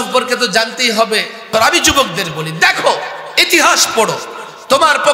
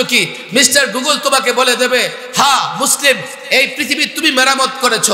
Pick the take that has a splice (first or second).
first